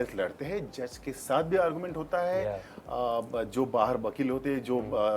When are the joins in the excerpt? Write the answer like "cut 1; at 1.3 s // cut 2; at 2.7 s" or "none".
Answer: none